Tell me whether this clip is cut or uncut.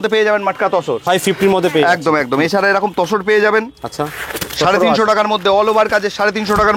uncut